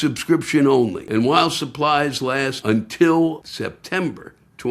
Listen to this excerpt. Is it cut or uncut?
cut